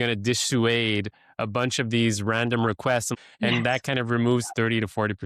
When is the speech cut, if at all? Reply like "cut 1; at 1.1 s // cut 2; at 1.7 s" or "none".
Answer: cut 1; at 3.1 s